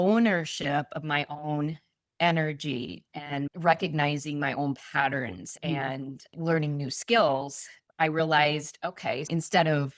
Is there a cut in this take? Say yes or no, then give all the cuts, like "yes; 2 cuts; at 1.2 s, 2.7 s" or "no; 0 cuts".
yes; 1 cut; at 3.5 s